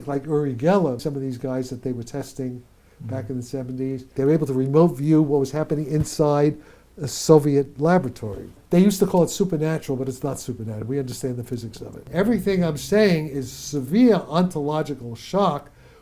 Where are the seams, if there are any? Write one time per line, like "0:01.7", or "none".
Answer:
0:01.0
0:04.1
0:08.6
0:12.0